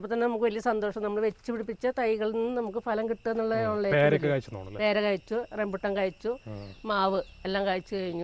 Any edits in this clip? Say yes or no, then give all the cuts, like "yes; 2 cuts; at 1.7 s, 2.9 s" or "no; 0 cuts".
no; 0 cuts